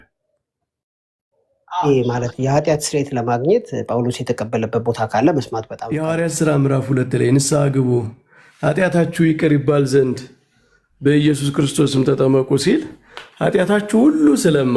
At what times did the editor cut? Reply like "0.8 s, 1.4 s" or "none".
5.8 s

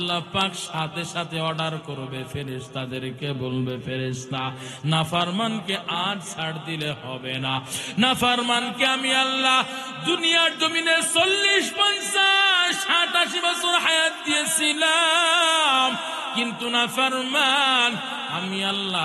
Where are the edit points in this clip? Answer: none

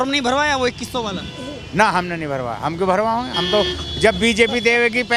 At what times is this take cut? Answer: none

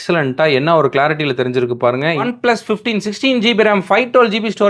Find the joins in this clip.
2.2 s

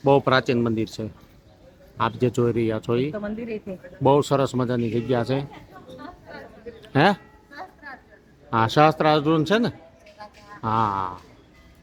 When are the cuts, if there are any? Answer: none

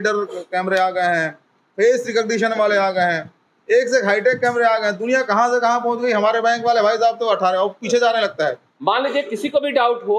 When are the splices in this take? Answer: 8.7 s

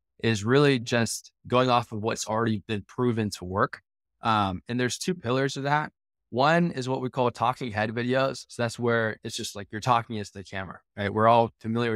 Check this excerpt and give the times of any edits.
none

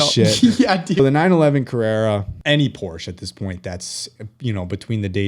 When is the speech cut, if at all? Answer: 1.0 s, 2.3 s

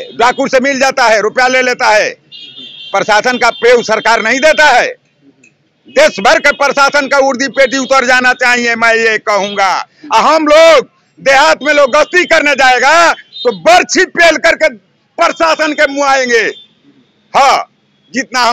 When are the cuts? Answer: none

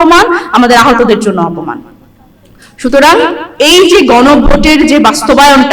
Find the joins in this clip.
none

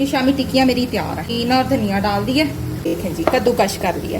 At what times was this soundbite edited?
1.3 s, 3.0 s

